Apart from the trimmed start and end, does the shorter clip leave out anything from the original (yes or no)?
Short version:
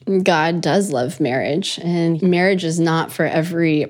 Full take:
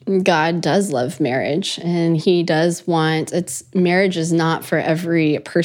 yes